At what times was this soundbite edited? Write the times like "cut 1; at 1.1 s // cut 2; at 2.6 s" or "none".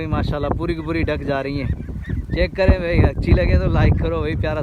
none